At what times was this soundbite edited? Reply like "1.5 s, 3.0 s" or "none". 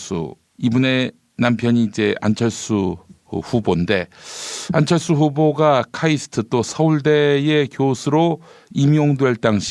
1.4 s